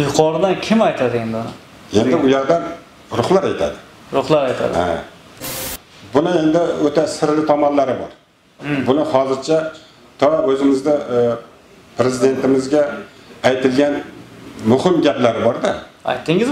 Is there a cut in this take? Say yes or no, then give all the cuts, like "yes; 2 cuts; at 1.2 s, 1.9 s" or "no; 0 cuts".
yes; 1 cut; at 5.5 s